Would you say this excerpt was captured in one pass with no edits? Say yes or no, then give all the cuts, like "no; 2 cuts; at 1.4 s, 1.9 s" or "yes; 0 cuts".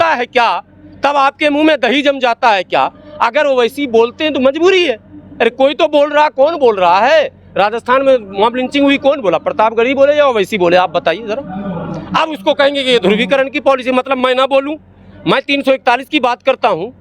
yes; 0 cuts